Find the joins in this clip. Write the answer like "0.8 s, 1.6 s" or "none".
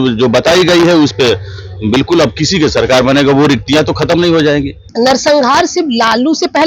4.8 s

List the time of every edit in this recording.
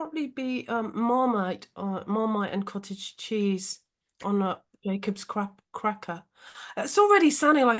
none

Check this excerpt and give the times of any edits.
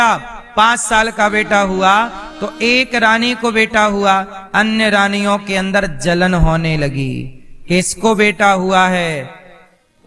none

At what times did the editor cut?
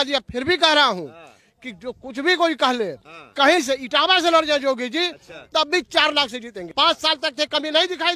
6.7 s

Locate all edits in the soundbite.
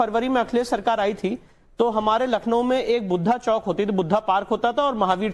none

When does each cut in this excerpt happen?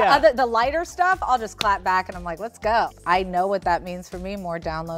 2.9 s

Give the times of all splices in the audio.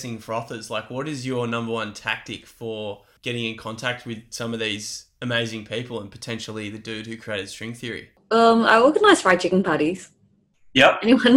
3.1 s, 8.2 s

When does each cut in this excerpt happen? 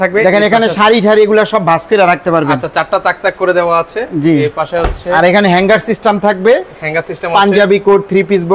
none

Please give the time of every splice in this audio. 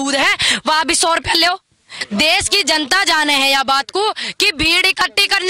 1.9 s

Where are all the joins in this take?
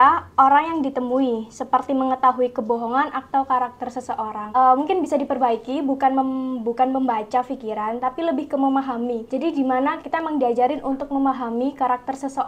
10.0 s

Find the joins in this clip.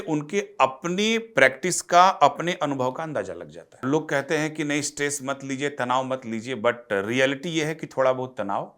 3.8 s

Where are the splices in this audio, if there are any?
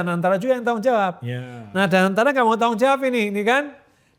none

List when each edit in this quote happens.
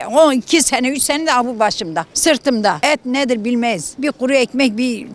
2.1 s, 2.8 s, 3.9 s

